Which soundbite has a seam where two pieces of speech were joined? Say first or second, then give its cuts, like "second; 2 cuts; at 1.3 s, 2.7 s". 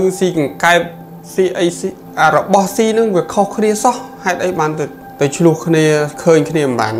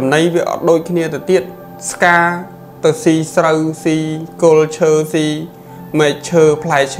first; 2 cuts; at 2.0 s, 5.0 s